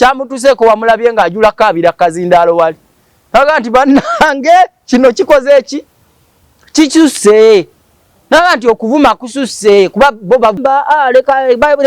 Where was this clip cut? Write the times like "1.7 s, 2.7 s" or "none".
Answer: 10.6 s